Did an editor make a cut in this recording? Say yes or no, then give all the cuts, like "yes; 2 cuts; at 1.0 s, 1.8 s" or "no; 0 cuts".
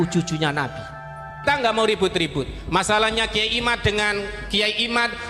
yes; 1 cut; at 1.4 s